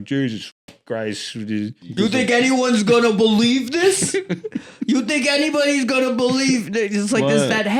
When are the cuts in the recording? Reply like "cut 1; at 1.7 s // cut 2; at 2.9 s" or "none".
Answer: cut 1; at 1.8 s